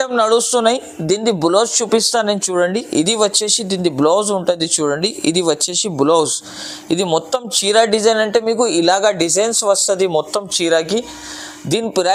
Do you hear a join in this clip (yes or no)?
no